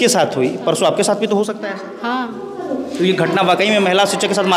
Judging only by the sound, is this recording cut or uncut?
uncut